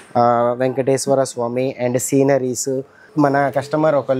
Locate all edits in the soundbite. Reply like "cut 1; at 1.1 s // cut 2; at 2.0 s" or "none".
cut 1; at 3.0 s